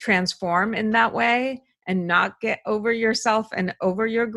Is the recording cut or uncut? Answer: uncut